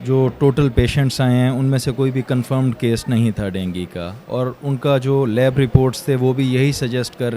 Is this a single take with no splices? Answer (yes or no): yes